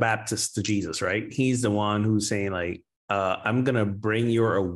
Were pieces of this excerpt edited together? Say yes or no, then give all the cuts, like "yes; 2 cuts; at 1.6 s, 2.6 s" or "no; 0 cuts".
no; 0 cuts